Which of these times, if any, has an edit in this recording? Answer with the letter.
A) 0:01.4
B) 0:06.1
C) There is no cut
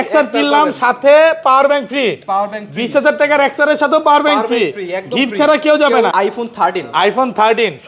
B